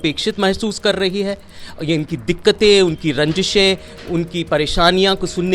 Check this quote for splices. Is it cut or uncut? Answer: uncut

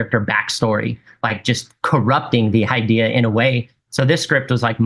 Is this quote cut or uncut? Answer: cut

